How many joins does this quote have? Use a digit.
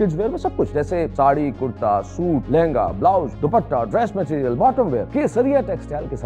4